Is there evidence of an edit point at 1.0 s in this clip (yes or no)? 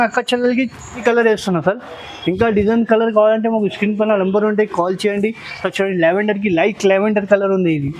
yes